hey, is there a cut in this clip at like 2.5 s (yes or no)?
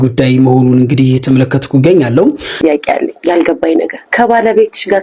yes